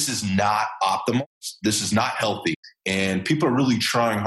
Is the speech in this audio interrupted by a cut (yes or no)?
yes